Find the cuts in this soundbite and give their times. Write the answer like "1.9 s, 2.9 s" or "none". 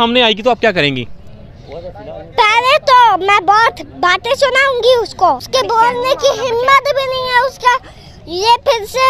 5.4 s

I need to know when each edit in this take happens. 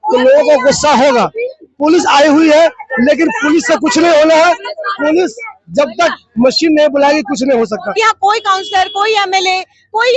7.8 s

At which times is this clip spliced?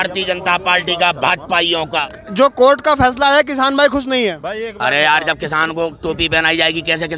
2.1 s

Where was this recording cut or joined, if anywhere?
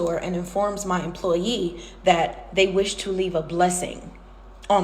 none

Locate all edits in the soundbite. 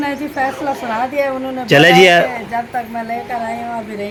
none

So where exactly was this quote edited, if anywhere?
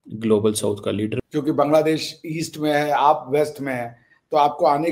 1.2 s

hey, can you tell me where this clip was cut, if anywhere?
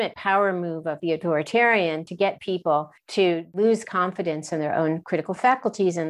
3.5 s

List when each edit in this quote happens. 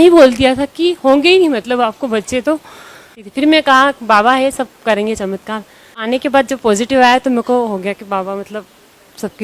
3.3 s, 6.0 s

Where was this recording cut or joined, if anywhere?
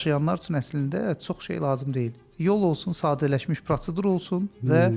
none

